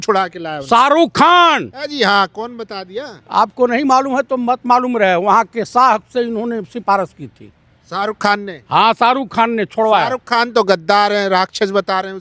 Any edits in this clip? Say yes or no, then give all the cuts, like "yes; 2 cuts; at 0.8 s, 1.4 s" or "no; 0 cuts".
no; 0 cuts